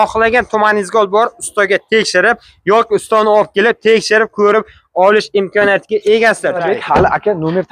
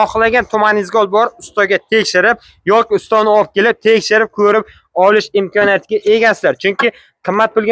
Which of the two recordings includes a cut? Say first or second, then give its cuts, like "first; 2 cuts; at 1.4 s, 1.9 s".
first; 1 cut; at 6.6 s